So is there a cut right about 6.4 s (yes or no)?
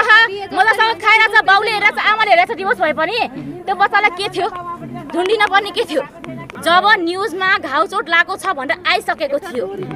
yes